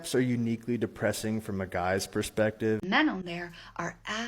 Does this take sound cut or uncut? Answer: cut